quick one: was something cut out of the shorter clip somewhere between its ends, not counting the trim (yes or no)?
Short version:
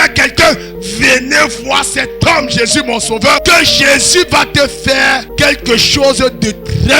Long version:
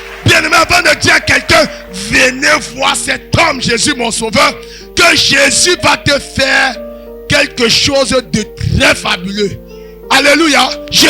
yes